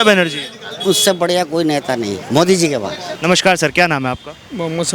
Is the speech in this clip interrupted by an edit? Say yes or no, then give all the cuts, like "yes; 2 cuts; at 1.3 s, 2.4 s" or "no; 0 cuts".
yes; 1 cut; at 3.0 s